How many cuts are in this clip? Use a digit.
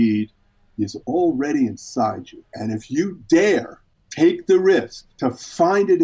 1